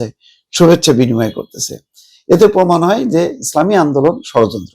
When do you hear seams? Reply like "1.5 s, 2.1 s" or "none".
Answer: none